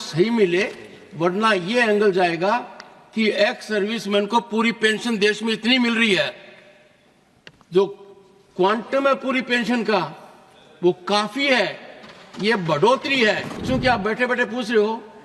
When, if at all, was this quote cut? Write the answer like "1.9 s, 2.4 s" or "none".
13.6 s